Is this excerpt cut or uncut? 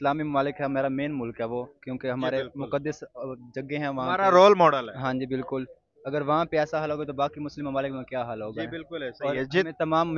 uncut